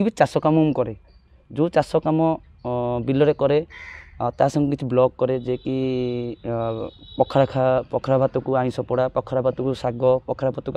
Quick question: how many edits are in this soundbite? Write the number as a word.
zero